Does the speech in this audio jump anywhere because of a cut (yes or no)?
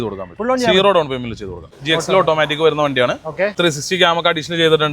yes